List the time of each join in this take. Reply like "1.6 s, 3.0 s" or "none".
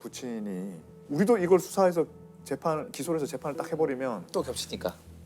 none